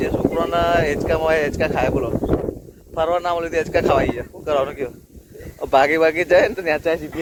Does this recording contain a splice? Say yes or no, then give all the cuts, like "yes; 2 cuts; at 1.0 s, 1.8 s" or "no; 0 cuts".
no; 0 cuts